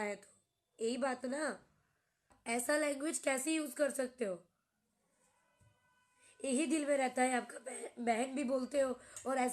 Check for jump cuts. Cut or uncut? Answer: cut